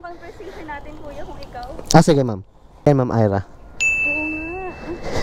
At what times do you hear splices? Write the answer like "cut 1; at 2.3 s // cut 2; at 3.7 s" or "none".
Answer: cut 1; at 2.9 s